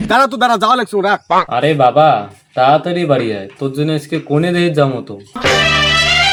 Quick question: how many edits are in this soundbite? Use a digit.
0